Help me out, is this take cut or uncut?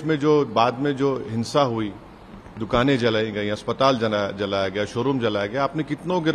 uncut